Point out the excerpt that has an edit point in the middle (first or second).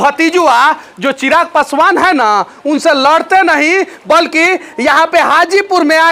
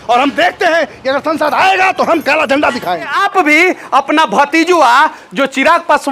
second